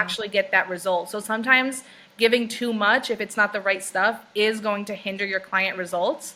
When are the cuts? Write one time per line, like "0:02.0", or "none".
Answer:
none